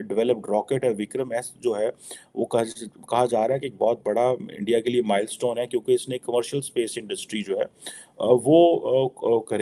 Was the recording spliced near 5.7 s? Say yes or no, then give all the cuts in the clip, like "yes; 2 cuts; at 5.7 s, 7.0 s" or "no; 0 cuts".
no; 0 cuts